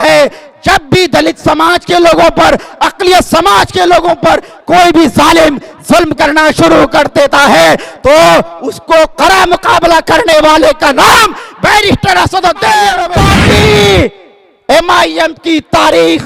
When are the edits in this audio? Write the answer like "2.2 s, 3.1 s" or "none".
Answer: 13.2 s